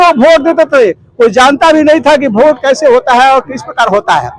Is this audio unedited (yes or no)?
yes